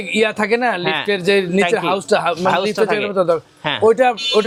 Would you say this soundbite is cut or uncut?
uncut